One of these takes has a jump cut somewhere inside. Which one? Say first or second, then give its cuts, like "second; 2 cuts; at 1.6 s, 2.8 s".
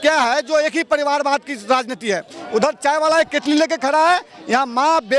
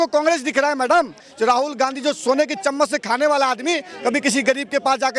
second; 1 cut; at 1.3 s